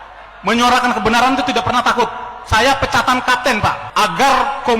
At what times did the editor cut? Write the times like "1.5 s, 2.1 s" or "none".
3.8 s